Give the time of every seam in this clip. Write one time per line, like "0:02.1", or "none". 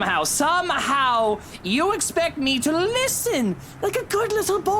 none